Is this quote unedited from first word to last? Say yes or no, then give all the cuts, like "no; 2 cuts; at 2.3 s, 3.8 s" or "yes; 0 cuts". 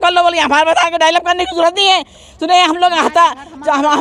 yes; 0 cuts